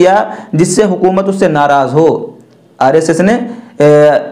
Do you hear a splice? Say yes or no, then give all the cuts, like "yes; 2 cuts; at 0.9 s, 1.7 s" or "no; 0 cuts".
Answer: no; 0 cuts